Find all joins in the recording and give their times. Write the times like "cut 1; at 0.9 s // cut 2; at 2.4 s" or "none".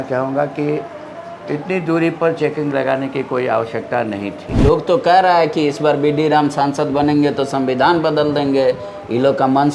cut 1; at 4.6 s